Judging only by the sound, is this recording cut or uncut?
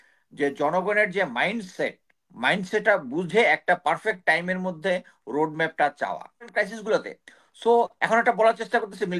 cut